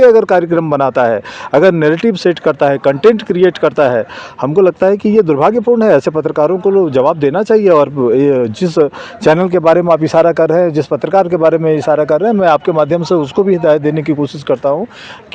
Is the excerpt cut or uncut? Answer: uncut